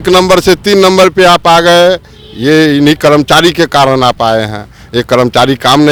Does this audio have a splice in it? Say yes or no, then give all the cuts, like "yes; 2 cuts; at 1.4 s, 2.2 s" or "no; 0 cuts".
no; 0 cuts